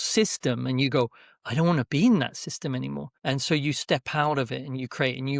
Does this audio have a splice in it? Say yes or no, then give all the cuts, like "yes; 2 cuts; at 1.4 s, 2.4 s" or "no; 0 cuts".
yes; 1 cut; at 3.1 s